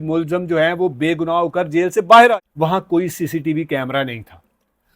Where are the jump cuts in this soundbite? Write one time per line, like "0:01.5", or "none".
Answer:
0:02.3